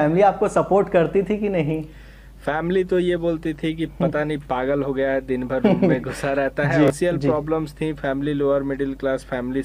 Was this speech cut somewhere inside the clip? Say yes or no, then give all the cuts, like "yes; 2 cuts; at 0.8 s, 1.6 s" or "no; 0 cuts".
yes; 1 cut; at 6.9 s